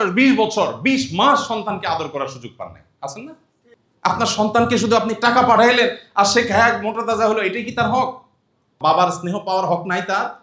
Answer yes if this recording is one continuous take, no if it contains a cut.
yes